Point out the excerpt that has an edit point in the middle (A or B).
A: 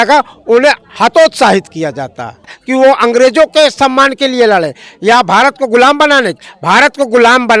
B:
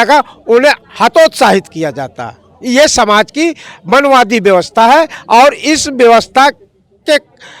A